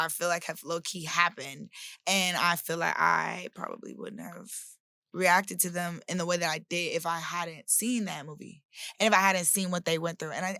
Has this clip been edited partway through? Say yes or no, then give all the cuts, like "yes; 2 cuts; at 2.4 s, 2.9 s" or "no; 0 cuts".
no; 0 cuts